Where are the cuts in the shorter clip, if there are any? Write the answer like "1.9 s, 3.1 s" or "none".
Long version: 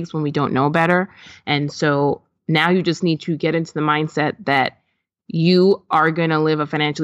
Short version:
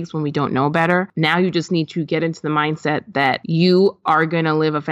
1.1 s, 3.4 s